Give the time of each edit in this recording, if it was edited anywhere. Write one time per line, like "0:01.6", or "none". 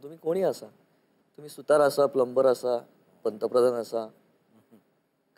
none